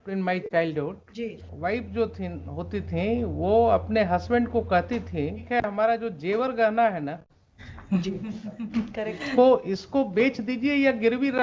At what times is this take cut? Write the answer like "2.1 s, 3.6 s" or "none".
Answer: 1.4 s, 5.4 s